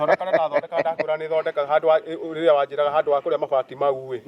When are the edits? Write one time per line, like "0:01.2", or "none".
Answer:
none

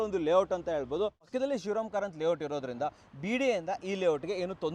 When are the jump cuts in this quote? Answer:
0:01.3

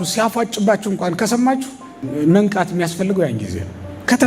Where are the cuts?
0:02.0

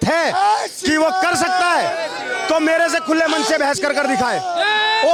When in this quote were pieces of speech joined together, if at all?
none

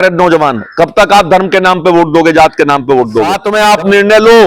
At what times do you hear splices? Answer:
0:03.4

